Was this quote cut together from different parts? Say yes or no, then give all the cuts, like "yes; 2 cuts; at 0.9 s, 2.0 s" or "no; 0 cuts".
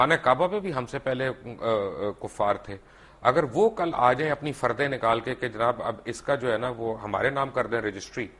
no; 0 cuts